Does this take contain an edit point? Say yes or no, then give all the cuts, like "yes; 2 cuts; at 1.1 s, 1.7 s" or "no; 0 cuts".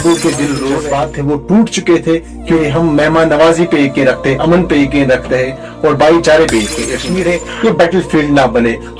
yes; 3 cuts; at 0.8 s, 2.6 s, 7.0 s